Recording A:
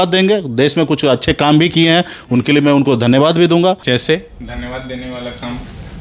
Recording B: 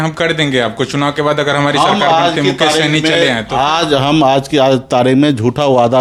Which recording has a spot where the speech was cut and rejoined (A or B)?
A